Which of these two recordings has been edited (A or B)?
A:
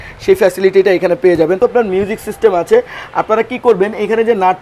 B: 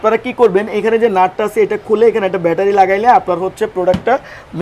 A